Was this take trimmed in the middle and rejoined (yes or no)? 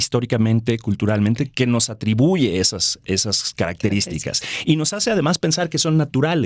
no